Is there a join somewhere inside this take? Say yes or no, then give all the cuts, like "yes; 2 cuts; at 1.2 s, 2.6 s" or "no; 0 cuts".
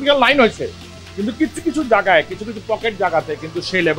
no; 0 cuts